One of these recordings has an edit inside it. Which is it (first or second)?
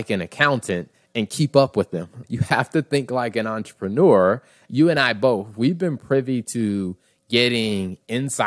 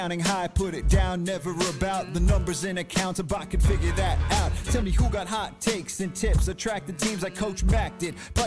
first